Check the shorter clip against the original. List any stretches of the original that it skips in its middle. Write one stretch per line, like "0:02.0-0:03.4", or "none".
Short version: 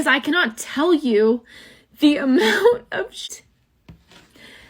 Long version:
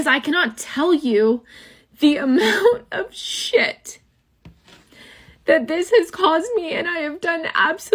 0:03.3-0:03.9

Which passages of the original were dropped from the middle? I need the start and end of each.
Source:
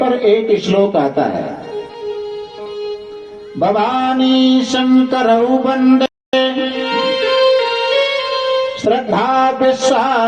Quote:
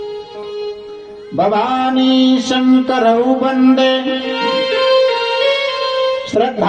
0:06.1-0:06.3

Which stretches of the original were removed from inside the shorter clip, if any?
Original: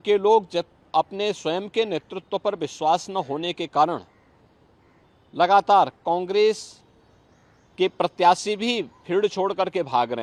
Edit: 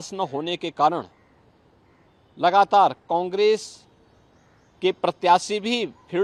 none

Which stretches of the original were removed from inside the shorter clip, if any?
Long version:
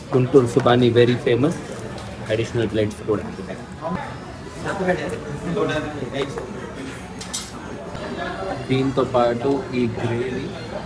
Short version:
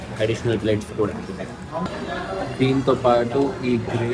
0:04.0-0:08.0

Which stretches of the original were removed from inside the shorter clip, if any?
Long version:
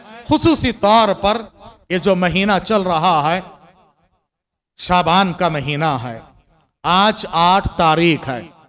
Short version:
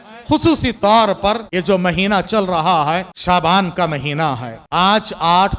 0:01.5-0:01.9
0:03.5-0:04.8
0:06.2-0:06.7

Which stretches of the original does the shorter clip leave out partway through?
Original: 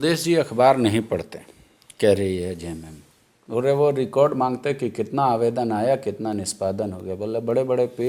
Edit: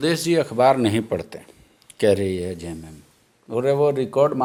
none

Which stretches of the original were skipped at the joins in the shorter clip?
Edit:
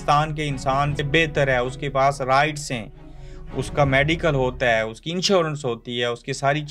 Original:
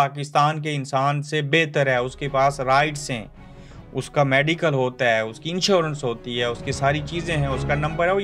0:01.3-0:01.4

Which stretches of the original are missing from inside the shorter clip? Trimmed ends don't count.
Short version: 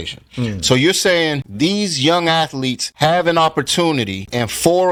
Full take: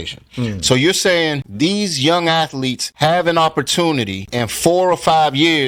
none

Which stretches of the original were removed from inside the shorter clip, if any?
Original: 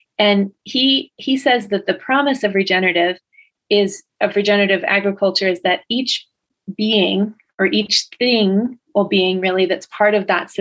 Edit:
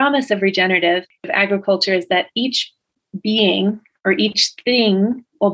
0:03.4-0:04.9

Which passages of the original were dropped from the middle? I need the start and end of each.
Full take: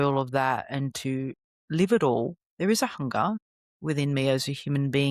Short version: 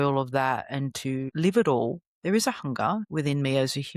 0:01.3-0:01.6
0:03.4-0:03.8

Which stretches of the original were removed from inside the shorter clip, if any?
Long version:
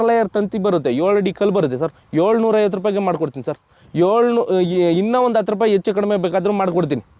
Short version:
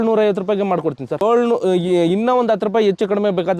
0:03.6-0:04.1

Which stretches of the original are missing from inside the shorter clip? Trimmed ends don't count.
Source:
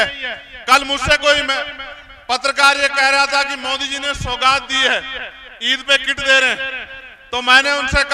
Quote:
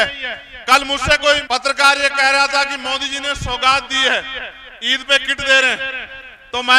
0:01.4-0:02.2

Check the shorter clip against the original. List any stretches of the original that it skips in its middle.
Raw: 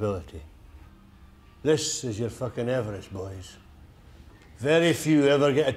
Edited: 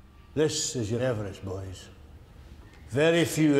0:02.3-0:02.7

